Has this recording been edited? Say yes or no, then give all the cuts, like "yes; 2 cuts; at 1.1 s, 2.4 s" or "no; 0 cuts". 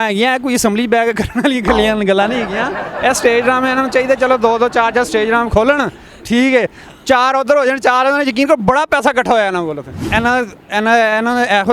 no; 0 cuts